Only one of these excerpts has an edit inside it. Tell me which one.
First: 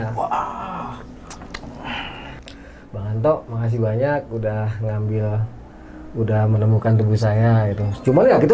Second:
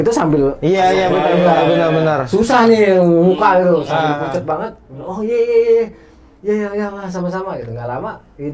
first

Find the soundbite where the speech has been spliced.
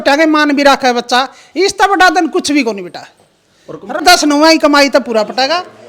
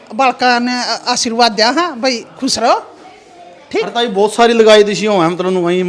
first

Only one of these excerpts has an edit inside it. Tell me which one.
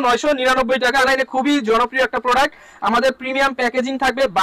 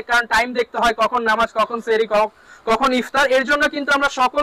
first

